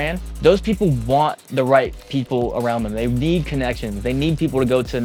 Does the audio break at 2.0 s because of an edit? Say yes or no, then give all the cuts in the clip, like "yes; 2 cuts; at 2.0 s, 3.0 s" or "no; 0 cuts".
no; 0 cuts